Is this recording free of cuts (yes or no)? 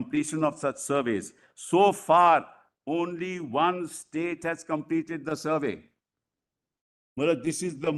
yes